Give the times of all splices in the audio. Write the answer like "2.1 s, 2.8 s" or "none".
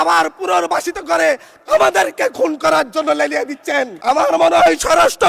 3.9 s